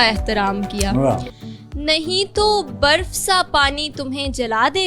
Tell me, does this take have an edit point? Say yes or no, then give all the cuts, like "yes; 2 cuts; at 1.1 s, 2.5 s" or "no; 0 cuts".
yes; 1 cut; at 1.3 s